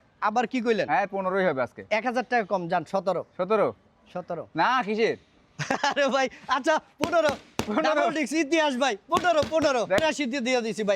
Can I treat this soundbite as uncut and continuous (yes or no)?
no